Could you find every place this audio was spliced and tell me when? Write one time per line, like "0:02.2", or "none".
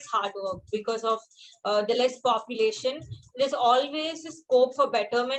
none